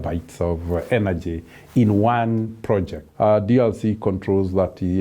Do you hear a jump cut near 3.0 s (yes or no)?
yes